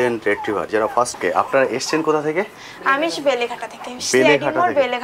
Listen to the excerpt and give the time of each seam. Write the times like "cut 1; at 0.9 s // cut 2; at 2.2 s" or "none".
cut 1; at 1.1 s